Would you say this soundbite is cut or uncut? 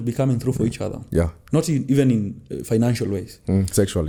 uncut